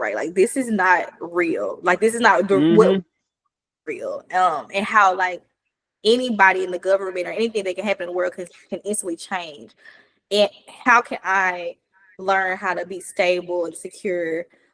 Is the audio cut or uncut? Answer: uncut